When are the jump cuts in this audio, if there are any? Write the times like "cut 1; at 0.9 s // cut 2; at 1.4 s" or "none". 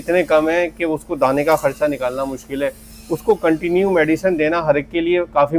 none